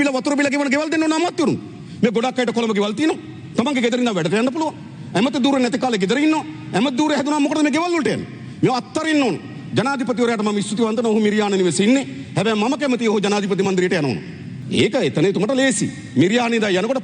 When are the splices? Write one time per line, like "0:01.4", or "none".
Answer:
none